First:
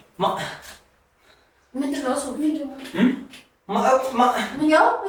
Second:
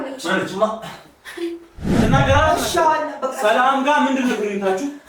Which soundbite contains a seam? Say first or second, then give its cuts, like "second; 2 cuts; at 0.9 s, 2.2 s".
second; 1 cut; at 1.9 s